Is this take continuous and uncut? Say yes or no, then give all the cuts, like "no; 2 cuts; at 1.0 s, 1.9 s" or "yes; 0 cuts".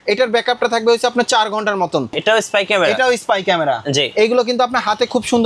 no; 1 cut; at 2.2 s